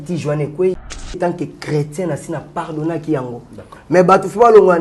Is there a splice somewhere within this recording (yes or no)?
yes